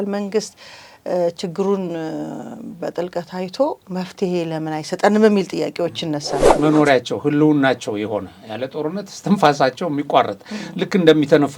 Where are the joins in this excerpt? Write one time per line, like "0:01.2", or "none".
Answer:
0:06.4